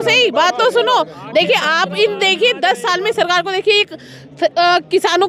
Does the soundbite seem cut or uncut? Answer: uncut